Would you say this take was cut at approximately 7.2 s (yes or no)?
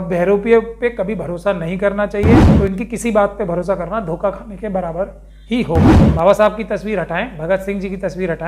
no